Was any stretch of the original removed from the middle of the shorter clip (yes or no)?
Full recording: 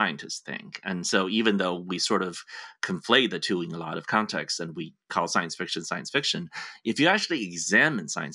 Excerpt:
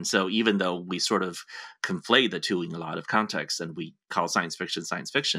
no